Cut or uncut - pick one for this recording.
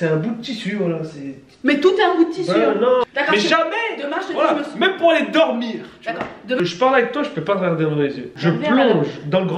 cut